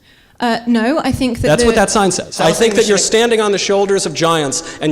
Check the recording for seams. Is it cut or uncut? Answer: cut